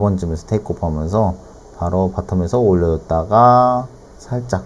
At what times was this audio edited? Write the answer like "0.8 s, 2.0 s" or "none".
none

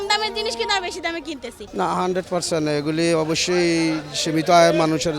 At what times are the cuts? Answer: 1.6 s

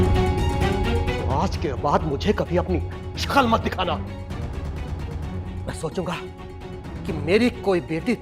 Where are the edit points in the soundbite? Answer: none

